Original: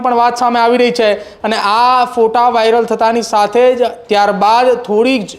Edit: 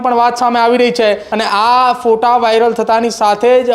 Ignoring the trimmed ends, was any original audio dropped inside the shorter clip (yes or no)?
yes